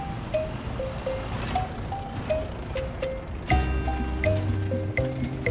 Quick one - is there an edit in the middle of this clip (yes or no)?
no